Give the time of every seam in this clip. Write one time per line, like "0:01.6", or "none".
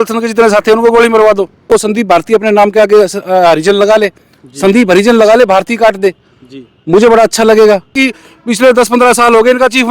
0:01.7
0:08.0

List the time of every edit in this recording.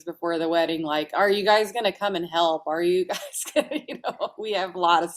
none

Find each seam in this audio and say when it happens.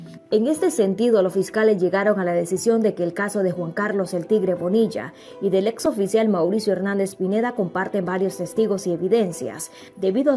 none

